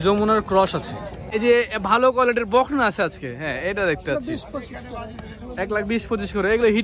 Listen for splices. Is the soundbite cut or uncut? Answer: cut